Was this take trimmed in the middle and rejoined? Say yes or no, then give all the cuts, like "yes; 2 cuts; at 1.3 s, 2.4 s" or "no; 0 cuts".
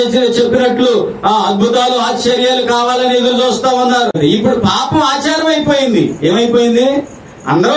yes; 1 cut; at 4.2 s